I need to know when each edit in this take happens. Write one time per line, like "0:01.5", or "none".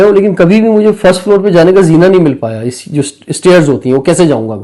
none

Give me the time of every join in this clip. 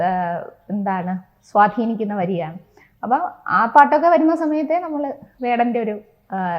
none

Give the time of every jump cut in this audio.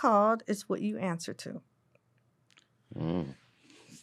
none

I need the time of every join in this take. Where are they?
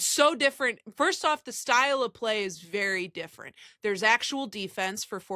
none

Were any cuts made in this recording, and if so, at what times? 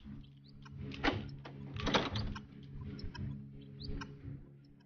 0:01.0

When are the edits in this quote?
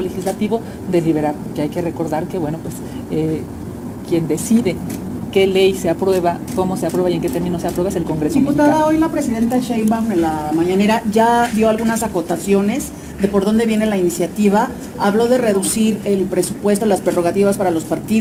none

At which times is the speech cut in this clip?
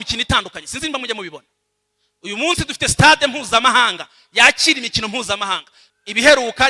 0:05.8

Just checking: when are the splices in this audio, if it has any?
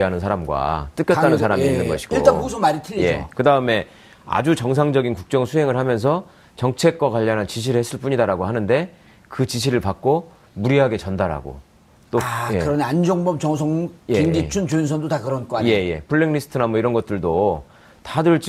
none

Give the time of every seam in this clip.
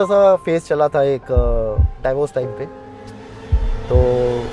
none

